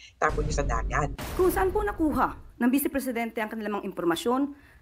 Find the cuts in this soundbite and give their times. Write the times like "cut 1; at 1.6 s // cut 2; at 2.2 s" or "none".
cut 1; at 1.2 s